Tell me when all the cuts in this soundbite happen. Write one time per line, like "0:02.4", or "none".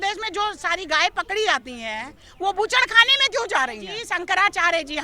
0:04.0